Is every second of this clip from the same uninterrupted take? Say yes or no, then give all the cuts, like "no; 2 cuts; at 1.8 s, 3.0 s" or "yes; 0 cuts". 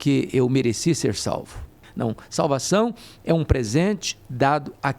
no; 1 cut; at 1.7 s